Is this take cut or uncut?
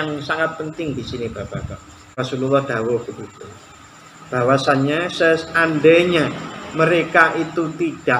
cut